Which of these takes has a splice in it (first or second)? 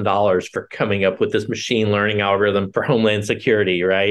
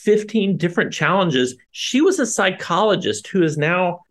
second